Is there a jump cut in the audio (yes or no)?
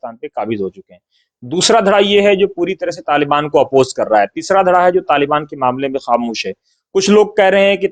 no